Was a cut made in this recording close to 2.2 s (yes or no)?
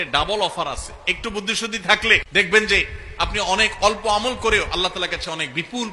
yes